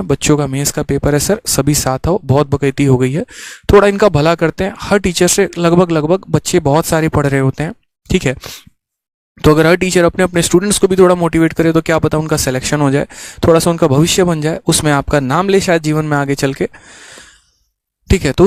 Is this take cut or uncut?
uncut